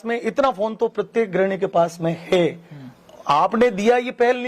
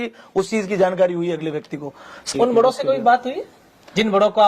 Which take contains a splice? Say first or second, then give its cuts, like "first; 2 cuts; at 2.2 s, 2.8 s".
second; 1 cut; at 2.2 s